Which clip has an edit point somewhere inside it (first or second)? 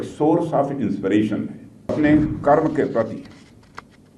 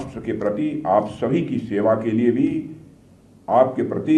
first